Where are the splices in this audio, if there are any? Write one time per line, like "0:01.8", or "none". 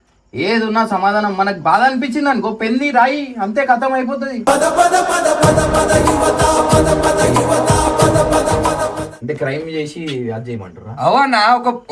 0:09.1